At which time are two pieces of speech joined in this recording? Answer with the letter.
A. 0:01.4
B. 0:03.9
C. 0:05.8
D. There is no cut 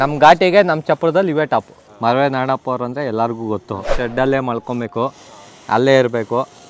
B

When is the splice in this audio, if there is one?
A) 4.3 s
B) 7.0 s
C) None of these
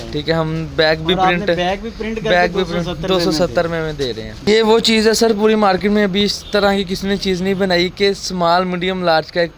A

